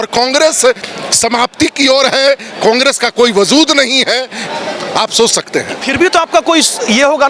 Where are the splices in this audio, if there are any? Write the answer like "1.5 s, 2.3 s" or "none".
none